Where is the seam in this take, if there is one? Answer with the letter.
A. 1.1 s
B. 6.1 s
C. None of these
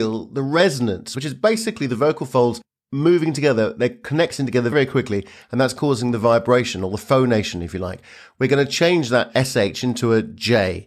A